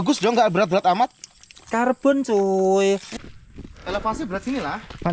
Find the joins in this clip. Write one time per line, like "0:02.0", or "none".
0:03.1